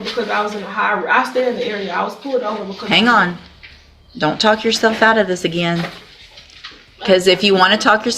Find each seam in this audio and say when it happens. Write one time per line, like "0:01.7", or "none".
none